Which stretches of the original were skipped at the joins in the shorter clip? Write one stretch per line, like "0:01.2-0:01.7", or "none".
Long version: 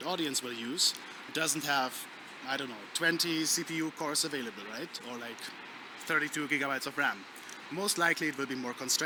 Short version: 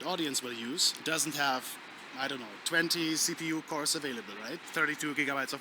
0:00.9-0:01.2
0:04.9-0:06.0